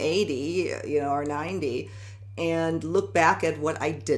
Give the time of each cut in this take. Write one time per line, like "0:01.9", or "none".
none